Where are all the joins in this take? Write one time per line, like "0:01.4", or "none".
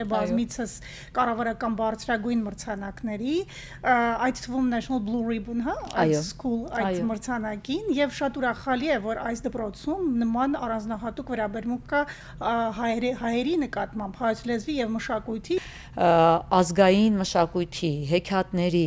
0:15.6